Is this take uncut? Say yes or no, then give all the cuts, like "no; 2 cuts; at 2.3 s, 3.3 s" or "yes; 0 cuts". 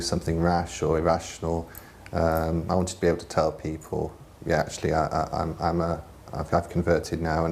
no; 1 cut; at 2.7 s